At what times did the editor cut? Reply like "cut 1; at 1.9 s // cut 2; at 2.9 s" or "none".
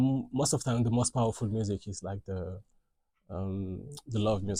none